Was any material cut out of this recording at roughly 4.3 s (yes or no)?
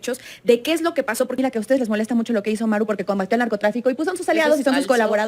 no